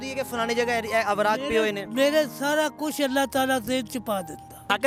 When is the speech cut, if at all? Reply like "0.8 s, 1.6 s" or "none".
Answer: none

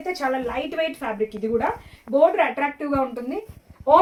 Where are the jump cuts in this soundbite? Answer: none

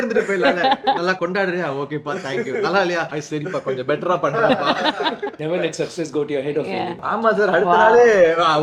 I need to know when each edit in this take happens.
1.2 s, 3.1 s, 5.3 s, 7.0 s

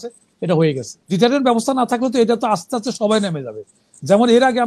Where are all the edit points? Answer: 1.1 s

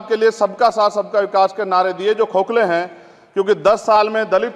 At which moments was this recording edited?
none

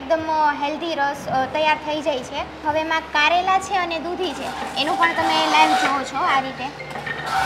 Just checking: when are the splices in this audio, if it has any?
2.6 s

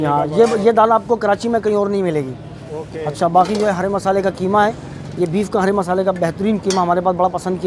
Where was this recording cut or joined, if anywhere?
none

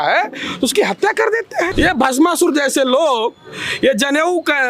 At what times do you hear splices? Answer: 1.7 s

